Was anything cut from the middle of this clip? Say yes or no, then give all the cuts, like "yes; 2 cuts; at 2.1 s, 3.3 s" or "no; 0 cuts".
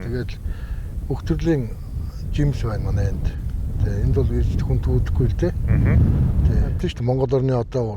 yes; 1 cut; at 6.9 s